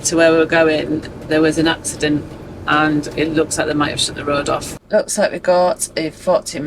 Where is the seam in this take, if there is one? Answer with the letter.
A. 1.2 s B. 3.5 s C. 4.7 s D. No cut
C